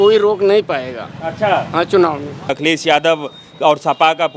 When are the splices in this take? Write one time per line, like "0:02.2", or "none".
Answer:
0:02.5